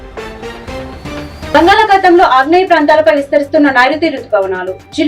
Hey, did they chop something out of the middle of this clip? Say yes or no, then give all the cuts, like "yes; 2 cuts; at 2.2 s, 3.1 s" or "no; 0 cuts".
yes; 1 cut; at 1.5 s